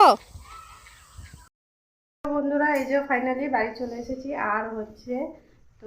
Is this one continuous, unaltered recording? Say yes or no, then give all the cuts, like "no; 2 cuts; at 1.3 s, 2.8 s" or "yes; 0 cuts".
no; 1 cut; at 1.7 s